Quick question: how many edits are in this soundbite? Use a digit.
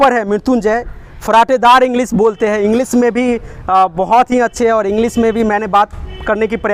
0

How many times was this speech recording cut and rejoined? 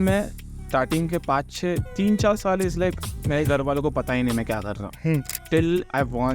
1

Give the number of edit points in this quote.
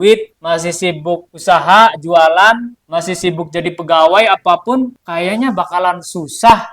3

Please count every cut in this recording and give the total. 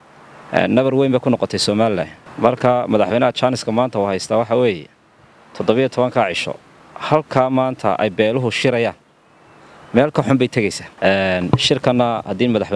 2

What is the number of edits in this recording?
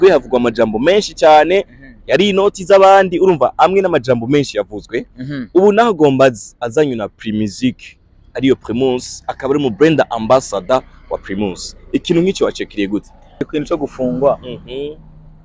1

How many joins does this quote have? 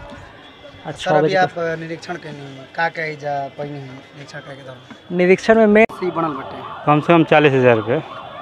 1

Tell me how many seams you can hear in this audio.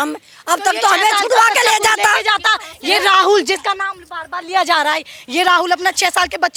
0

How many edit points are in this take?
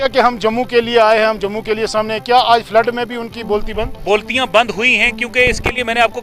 1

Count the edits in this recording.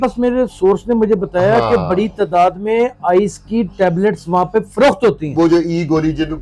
0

